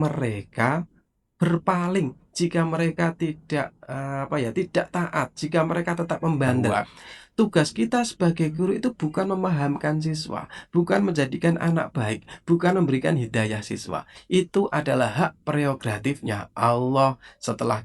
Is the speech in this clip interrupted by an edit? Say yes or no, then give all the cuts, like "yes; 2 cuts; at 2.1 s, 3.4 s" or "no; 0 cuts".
yes; 1 cut; at 6.7 s